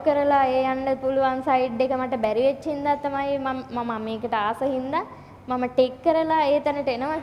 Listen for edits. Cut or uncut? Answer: uncut